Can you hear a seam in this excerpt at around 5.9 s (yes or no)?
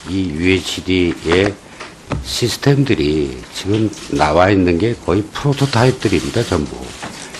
yes